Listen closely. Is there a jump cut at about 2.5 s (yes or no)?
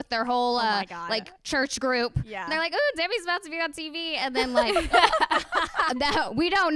yes